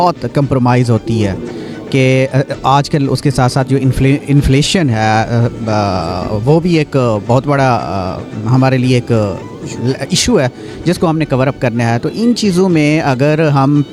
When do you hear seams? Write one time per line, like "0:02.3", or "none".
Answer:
none